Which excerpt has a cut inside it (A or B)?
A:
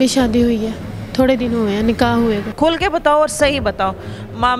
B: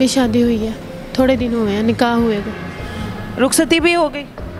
A